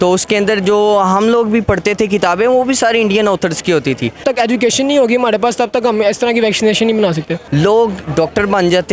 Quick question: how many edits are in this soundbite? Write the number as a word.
two